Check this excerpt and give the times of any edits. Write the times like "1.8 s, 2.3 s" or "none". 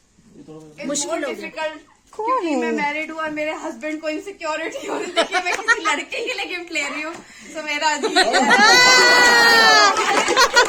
none